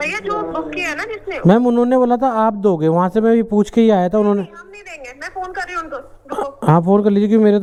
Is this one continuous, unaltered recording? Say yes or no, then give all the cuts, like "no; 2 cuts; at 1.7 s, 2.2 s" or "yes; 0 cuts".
yes; 0 cuts